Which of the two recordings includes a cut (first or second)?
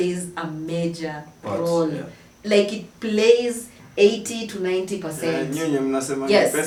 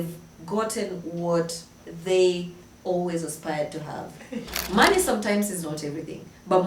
second